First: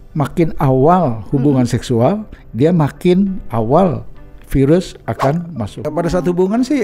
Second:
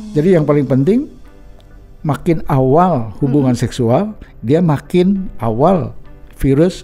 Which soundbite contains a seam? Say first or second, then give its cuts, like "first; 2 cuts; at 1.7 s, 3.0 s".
first; 1 cut; at 5.9 s